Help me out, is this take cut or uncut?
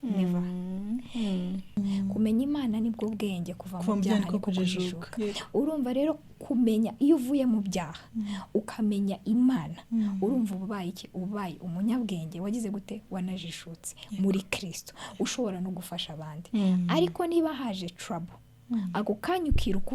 cut